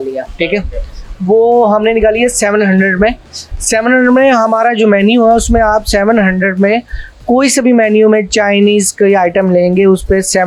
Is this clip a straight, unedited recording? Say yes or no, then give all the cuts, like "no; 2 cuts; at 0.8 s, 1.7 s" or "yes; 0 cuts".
yes; 0 cuts